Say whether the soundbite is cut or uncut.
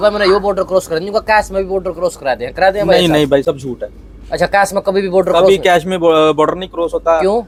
uncut